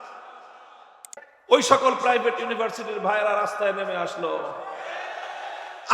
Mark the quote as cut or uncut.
cut